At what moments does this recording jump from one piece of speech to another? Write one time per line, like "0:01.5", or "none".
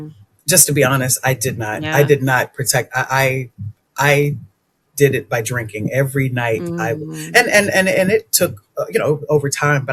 none